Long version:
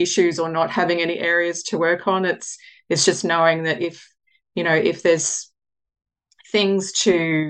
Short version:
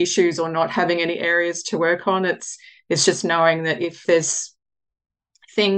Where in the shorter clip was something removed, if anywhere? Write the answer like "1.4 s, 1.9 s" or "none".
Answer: 4.0 s